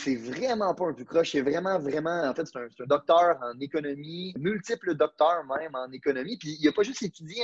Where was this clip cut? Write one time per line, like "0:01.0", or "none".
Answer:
0:04.4